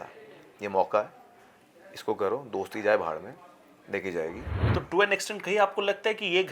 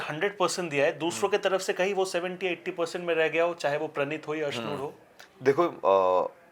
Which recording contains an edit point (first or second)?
first